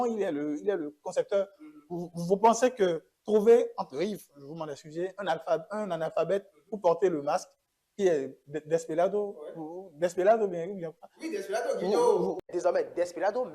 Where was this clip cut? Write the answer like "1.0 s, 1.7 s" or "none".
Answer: 12.5 s